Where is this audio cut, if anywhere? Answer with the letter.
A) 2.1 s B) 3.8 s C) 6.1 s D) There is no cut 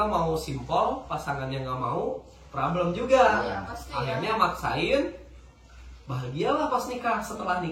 D